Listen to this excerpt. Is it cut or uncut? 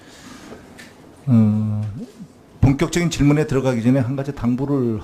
cut